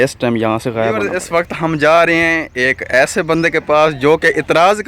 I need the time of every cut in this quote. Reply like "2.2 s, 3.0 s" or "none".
1.1 s